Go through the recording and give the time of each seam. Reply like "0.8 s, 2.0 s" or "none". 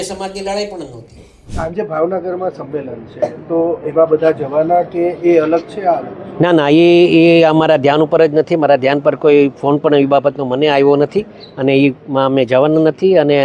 1.4 s

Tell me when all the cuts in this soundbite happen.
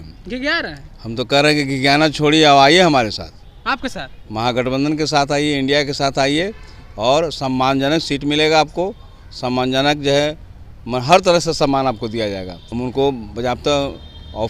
12.6 s

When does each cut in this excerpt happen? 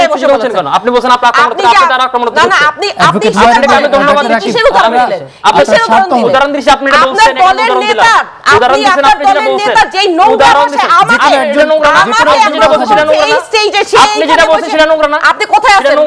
none

